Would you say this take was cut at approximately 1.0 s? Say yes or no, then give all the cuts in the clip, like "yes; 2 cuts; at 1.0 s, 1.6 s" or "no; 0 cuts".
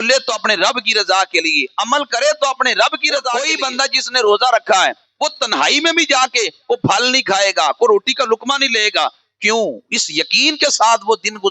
no; 1 cut; at 3.5 s